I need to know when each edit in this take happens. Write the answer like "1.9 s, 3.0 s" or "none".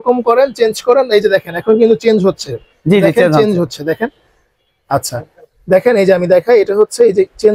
none